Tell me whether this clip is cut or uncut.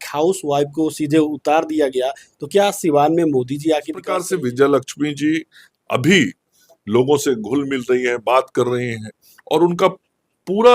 cut